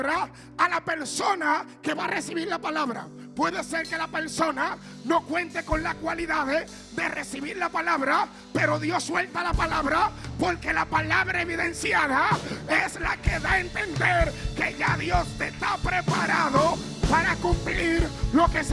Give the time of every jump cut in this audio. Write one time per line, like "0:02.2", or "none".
none

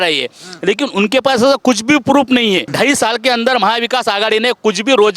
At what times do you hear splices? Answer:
0:02.7

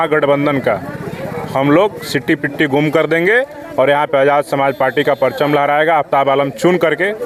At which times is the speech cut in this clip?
none

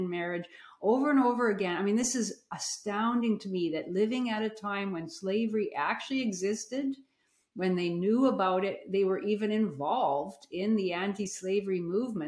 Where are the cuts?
none

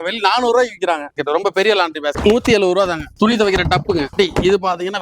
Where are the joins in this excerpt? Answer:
0:01.2
0:03.1

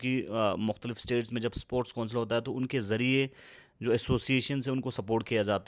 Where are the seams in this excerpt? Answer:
none

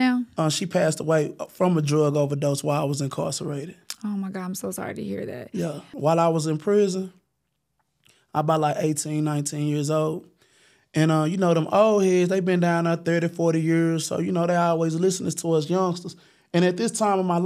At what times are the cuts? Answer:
0:05.9

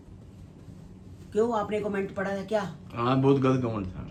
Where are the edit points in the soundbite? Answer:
none

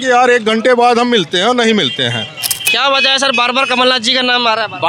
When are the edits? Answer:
0:02.7

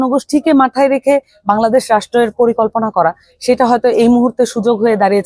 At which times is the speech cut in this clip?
none

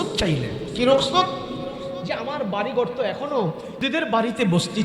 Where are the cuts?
0:03.8

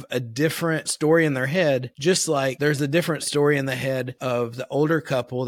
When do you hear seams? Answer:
0:00.9
0:02.1
0:04.1

